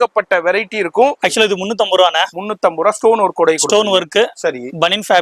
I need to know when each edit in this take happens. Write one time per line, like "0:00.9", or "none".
0:01.2